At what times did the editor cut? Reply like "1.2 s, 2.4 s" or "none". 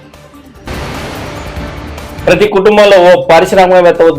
none